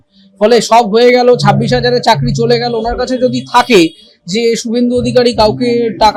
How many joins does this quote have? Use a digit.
0